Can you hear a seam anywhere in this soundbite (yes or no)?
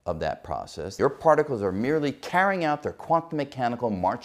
yes